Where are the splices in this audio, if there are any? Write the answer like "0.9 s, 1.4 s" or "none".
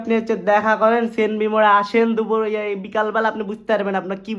none